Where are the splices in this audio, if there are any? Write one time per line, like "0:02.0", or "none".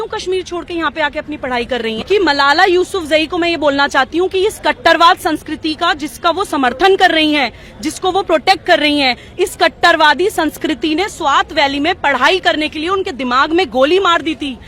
none